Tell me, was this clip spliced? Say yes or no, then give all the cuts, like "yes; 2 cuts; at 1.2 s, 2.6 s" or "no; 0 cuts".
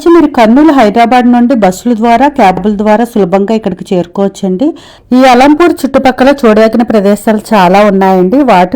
yes; 1 cut; at 4.9 s